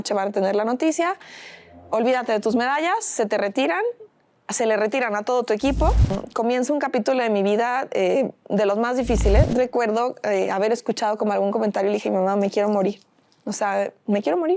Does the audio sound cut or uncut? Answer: cut